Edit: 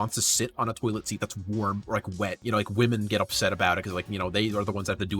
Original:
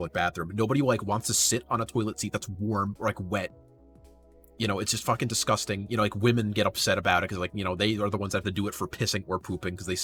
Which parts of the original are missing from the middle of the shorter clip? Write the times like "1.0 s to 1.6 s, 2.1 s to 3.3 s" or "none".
3.5 s to 5.8 s